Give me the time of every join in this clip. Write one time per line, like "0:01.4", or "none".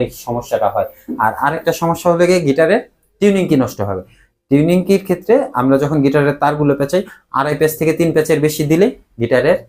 none